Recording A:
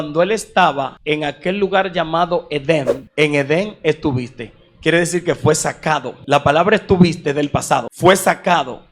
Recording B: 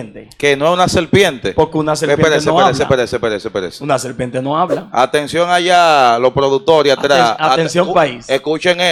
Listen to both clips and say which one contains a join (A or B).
A